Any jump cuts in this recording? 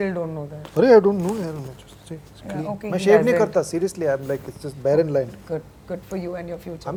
no; 0 cuts

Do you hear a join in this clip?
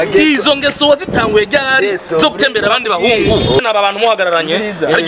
yes; 1 cut; at 3.6 s

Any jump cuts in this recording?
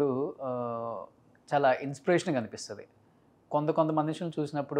no; 0 cuts

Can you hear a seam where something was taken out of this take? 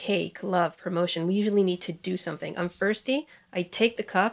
no; 0 cuts

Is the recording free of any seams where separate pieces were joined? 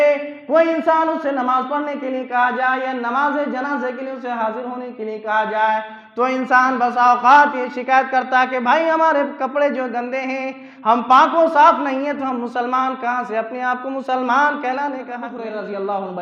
no; 1 cut; at 15.3 s

